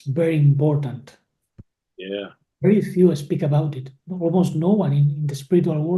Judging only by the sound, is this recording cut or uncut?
uncut